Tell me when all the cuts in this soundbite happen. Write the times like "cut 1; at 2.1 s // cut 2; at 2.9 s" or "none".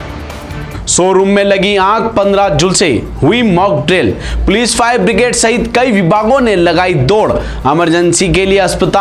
none